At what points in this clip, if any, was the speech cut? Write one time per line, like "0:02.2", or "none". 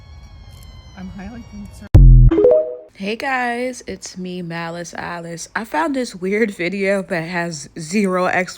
0:02.9